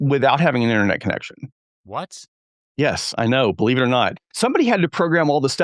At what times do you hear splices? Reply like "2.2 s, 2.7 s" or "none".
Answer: 1.7 s